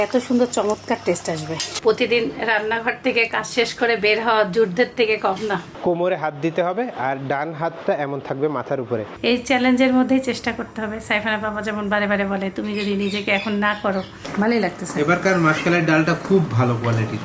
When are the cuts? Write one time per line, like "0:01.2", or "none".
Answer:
0:01.7
0:05.7
0:09.1
0:14.2